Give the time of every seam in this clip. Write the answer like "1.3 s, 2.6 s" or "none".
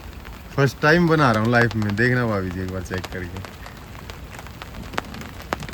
none